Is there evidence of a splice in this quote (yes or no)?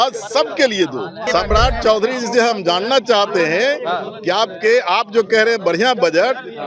yes